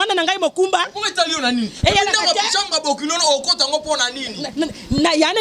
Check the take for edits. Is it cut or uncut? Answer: uncut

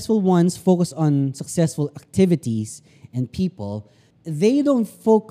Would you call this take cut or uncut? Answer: uncut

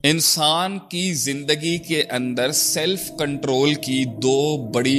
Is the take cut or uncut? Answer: uncut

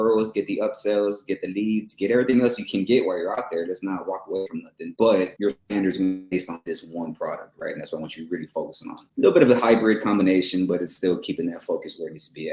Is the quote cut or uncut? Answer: cut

